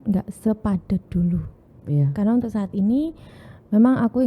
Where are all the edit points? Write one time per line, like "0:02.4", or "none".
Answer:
none